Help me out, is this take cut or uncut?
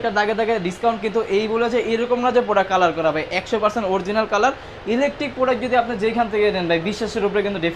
uncut